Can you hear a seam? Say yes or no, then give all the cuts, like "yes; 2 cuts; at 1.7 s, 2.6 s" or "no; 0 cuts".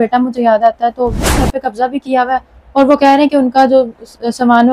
yes; 1 cut; at 1.3 s